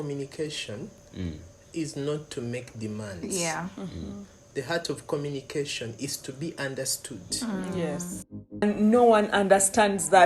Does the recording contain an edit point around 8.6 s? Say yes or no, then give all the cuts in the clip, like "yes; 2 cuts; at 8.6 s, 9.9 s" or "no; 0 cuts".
yes; 1 cut; at 8.6 s